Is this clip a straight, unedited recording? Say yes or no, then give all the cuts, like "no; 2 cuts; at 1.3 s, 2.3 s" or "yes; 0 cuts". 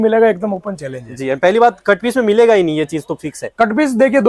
yes; 0 cuts